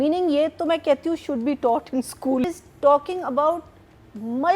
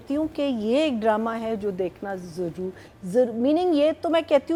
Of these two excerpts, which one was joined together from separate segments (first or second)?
first